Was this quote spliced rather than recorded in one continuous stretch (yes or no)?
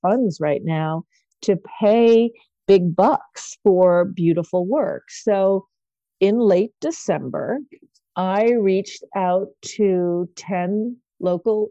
no